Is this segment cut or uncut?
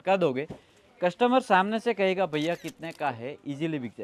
uncut